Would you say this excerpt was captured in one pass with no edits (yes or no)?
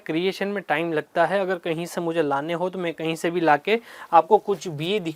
yes